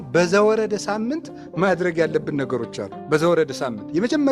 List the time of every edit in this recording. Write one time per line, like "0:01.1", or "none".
none